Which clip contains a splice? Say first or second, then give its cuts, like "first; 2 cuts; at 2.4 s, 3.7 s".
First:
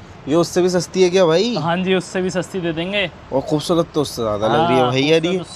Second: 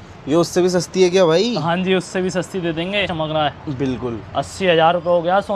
second; 1 cut; at 3.1 s